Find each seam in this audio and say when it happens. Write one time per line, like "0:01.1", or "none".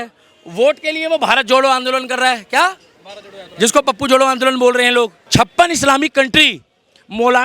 0:05.2